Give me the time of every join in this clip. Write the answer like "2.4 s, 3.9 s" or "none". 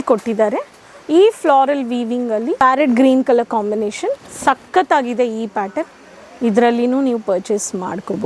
2.6 s